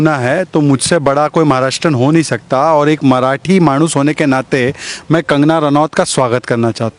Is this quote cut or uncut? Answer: uncut